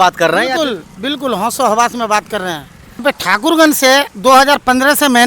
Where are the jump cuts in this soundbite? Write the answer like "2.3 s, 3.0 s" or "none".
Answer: 3.0 s